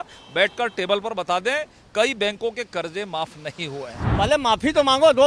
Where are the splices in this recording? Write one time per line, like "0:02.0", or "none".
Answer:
0:04.0